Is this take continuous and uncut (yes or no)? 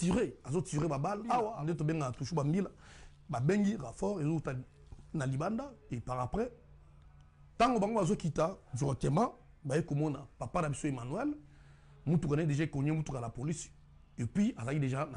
no